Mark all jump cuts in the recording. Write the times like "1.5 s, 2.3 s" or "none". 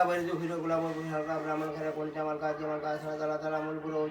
none